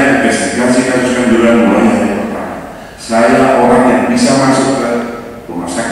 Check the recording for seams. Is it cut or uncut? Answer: uncut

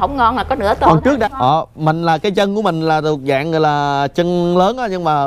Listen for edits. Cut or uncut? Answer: cut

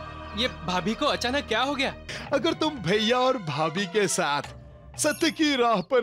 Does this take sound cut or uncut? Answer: cut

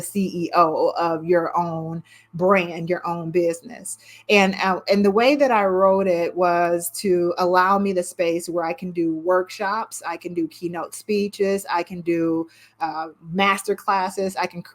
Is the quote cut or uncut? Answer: uncut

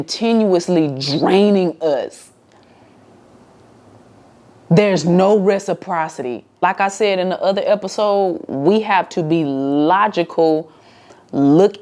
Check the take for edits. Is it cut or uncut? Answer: uncut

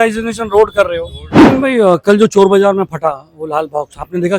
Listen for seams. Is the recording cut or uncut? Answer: cut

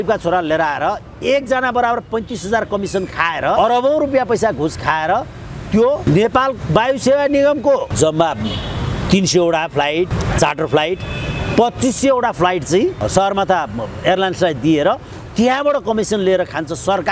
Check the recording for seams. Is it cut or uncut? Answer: cut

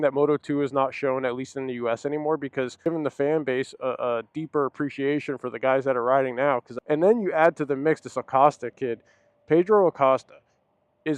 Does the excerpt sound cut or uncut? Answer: cut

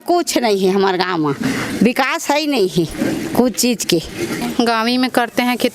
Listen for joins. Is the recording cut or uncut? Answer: cut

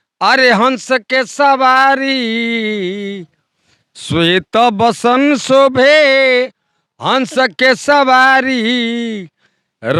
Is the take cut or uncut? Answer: uncut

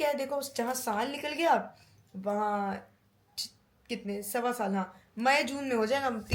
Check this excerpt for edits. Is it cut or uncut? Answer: uncut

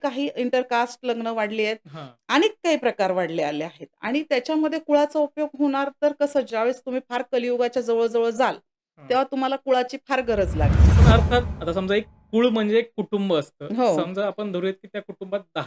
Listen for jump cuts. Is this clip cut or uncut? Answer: cut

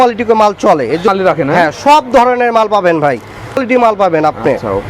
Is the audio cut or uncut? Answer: cut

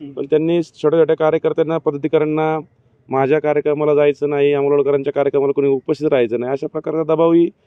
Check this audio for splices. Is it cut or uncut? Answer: uncut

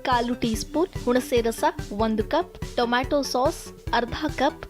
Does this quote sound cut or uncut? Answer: cut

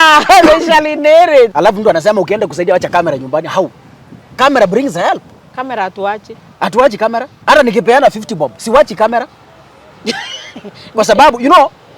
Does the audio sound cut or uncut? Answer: cut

